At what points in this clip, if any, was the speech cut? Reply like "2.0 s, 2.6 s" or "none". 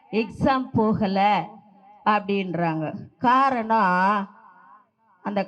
none